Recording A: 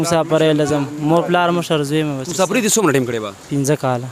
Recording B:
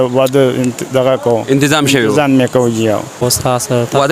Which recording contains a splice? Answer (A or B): B